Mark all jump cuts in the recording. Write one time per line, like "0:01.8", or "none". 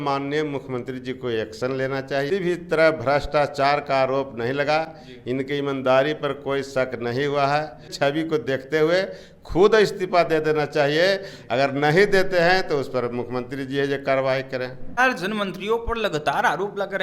0:02.3
0:07.9
0:15.0